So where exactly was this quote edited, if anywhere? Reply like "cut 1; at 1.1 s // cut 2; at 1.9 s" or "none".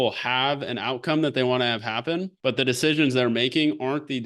cut 1; at 2.3 s